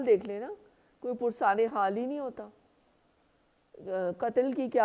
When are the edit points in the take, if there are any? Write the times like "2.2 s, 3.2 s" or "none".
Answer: none